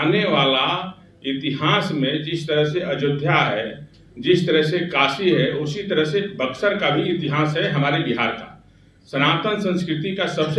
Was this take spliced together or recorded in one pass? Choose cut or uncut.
uncut